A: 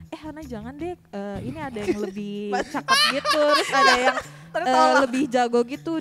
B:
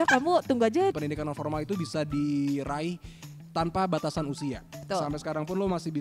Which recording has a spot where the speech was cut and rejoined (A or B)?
B